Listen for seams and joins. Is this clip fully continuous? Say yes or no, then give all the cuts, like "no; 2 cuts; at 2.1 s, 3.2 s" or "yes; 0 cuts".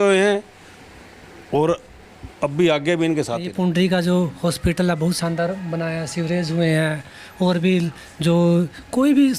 no; 1 cut; at 3.5 s